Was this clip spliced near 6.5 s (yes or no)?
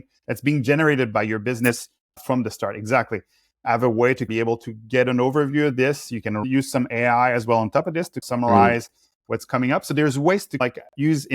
yes